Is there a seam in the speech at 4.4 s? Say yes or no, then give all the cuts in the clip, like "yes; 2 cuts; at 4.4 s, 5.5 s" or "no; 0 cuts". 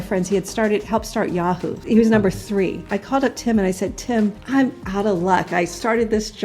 yes; 3 cuts; at 1.7 s, 2.9 s, 4.4 s